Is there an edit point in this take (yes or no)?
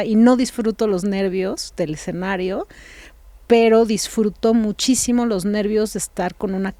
no